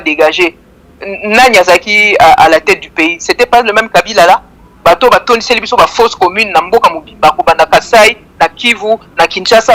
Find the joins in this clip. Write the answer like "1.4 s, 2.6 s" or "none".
none